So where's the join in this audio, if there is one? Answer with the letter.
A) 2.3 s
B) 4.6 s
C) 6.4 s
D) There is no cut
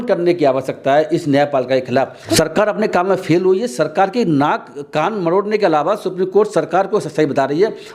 A